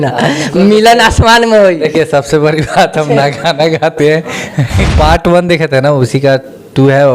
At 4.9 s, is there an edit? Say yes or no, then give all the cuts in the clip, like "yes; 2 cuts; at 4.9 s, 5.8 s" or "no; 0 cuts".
yes; 1 cut; at 4.9 s